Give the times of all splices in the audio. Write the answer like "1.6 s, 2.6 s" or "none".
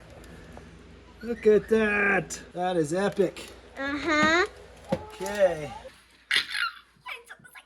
5.9 s